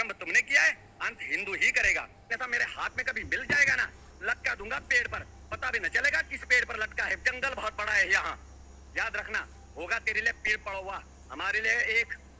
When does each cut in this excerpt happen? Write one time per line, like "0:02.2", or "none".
0:02.3